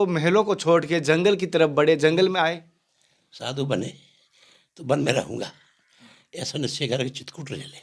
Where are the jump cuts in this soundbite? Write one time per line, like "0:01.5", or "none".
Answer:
none